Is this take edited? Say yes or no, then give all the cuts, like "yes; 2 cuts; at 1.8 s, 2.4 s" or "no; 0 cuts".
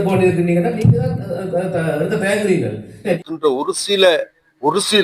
yes; 1 cut; at 3.2 s